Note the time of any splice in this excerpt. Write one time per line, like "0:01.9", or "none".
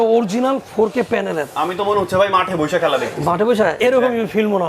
0:03.8